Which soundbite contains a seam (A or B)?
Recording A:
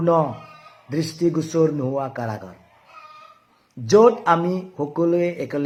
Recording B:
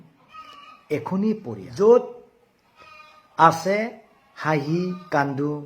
B